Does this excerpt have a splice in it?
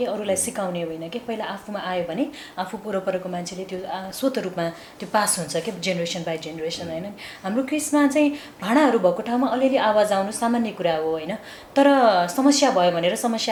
no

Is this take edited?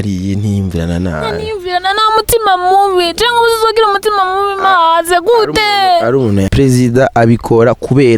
yes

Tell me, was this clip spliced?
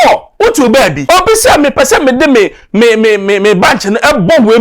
yes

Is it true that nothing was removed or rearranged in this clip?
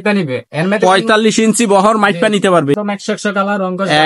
no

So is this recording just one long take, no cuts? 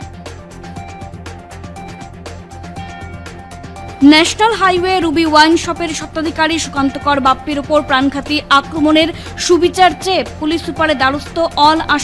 no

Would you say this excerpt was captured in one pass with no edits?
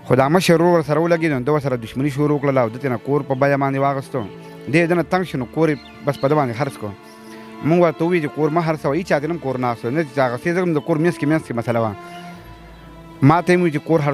yes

